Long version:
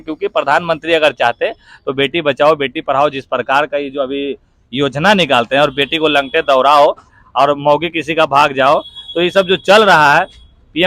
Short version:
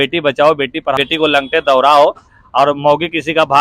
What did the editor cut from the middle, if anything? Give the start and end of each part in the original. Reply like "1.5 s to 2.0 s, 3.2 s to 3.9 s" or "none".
3.0 s to 5.8 s